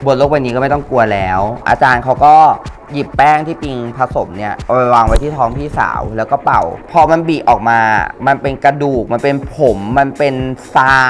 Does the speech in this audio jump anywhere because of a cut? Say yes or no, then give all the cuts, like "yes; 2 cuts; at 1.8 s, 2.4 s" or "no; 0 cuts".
yes; 2 cuts; at 1.6 s, 6.8 s